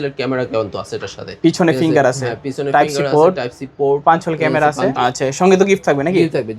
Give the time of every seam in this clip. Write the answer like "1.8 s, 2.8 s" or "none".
4.9 s